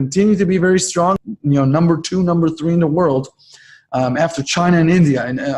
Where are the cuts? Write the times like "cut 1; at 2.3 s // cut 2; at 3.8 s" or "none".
cut 1; at 1.2 s